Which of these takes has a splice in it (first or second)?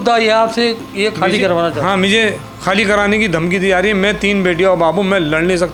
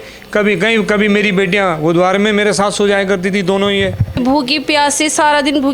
second